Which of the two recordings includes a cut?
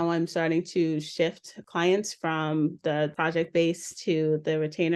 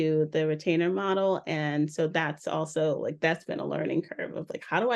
first; 2 cuts; at 1.6 s, 3.2 s

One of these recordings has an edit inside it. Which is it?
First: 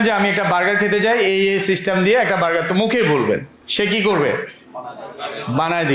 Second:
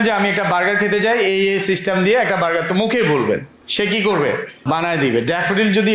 second; 1 cut; at 4.6 s

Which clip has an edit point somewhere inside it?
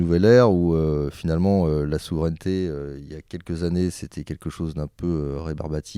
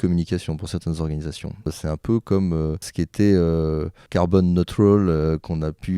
second; 3 cuts; at 1.7 s, 2.9 s, 4.0 s

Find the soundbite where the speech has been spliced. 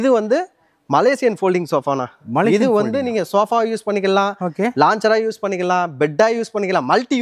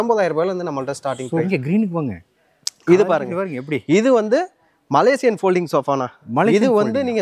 second; 1 cut; at 1.5 s

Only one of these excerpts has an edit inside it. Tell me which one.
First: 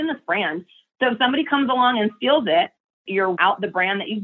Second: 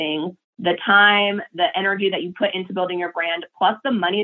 first; 1 cut; at 3.1 s

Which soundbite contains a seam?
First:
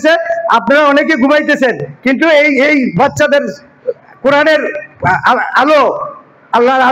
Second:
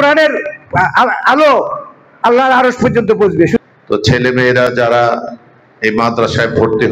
second; 1 cut; at 3.6 s

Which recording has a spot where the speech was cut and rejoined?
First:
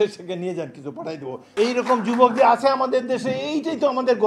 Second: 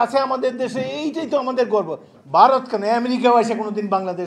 first; 1 cut; at 1.4 s

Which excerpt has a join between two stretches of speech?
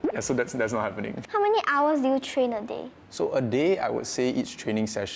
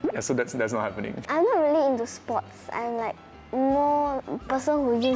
second; 2 cuts; at 1.1 s, 4.2 s

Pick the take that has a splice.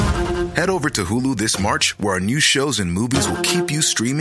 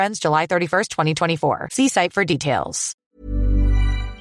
second; 1 cut; at 3.2 s

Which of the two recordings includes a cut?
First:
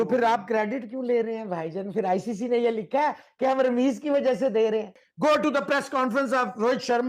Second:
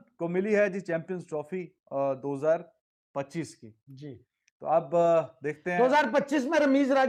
first; 1 cut; at 5.0 s

